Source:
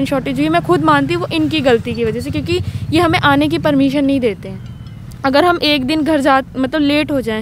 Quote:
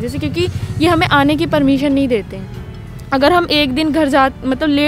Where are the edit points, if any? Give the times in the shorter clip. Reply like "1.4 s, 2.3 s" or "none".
none